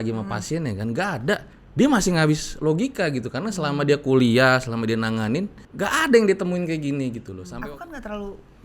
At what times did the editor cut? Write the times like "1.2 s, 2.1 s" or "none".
1.6 s, 5.6 s, 7.3 s